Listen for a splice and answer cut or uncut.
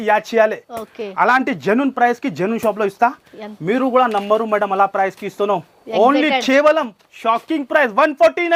uncut